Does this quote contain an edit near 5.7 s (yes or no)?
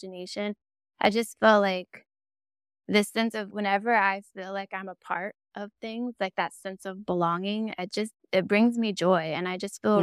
no